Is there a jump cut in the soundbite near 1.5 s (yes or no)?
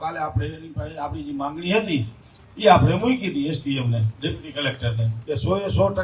no